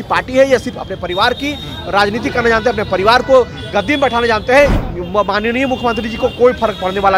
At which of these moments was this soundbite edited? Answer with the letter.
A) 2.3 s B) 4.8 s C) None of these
B